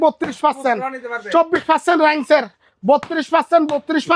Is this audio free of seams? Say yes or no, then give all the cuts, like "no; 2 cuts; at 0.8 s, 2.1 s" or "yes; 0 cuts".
yes; 0 cuts